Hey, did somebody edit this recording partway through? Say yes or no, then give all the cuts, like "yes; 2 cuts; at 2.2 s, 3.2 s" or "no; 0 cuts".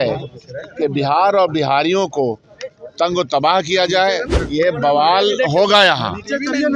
yes; 1 cut; at 4.4 s